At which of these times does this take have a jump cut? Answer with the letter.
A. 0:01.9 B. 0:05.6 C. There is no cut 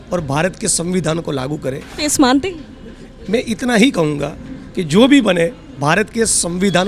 A